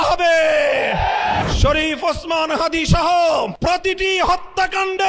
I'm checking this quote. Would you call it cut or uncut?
cut